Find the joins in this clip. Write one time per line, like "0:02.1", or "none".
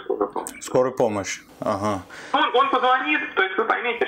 none